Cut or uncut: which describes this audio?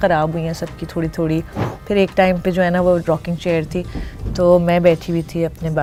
uncut